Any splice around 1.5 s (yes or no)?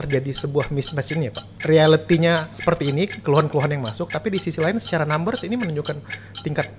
yes